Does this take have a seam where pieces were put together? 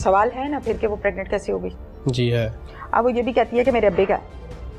no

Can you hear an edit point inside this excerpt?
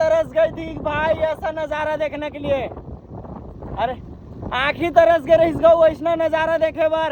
no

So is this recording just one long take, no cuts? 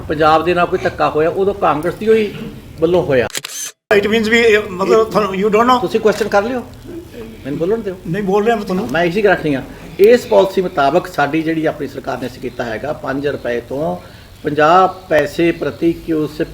no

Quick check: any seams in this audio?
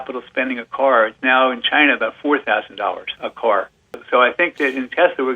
yes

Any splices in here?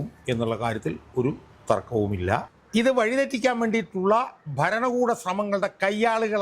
yes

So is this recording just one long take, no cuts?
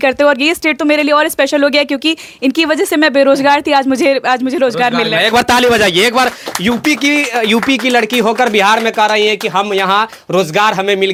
yes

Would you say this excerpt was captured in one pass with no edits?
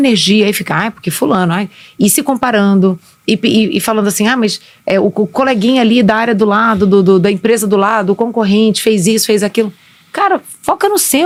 yes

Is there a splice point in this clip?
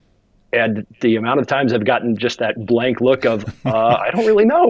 no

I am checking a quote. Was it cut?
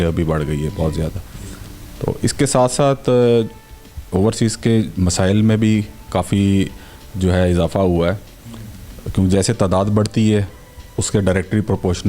no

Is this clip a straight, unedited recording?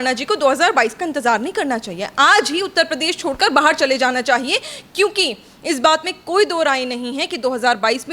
yes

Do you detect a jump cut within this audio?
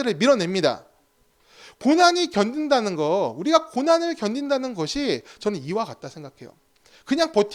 no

